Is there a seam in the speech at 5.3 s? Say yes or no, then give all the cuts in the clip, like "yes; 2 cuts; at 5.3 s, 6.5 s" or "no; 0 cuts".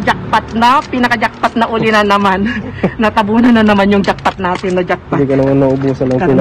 no; 0 cuts